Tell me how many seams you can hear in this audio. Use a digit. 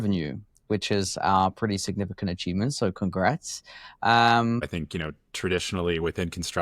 1